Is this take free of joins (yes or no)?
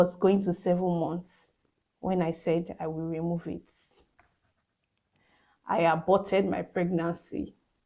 yes